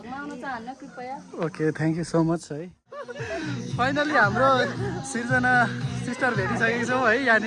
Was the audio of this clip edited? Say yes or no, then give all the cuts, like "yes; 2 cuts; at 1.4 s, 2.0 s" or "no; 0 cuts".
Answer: yes; 1 cut; at 2.5 s